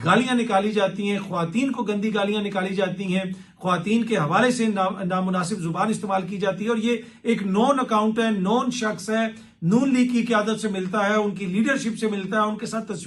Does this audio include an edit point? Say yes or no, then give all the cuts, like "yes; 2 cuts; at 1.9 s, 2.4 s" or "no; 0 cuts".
no; 0 cuts